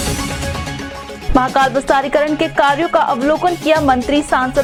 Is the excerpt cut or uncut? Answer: uncut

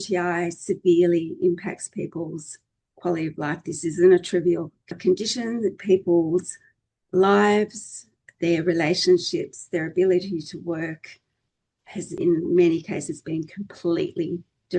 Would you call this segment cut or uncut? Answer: cut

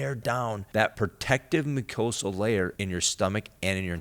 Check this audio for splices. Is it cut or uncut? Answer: cut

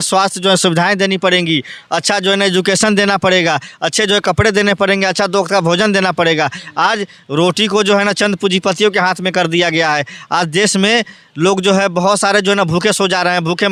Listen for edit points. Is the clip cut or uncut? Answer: uncut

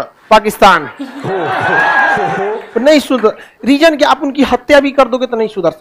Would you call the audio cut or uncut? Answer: uncut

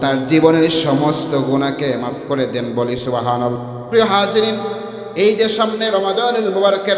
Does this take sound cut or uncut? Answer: cut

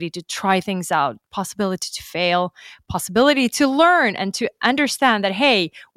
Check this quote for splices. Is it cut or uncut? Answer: uncut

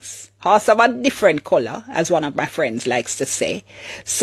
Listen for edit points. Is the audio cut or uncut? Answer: uncut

